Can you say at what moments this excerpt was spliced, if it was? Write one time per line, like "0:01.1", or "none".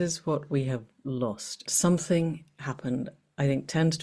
0:01.6